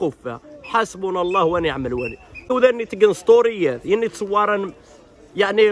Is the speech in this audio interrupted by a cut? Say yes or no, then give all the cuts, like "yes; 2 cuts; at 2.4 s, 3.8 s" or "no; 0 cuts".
yes; 1 cut; at 2.5 s